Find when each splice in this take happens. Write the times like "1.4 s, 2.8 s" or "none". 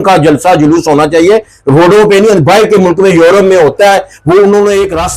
none

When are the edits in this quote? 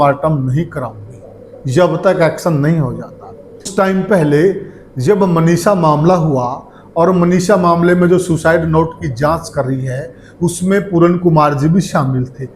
3.7 s

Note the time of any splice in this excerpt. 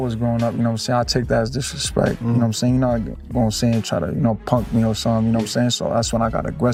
none

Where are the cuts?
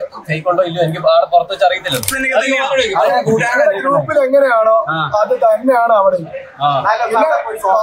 2.2 s

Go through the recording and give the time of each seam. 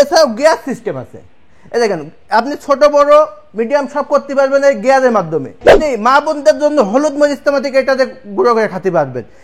5.8 s

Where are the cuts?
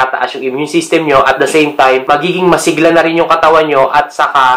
none

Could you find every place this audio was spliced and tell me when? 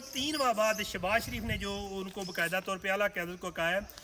none

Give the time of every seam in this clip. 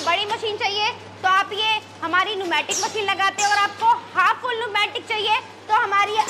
none

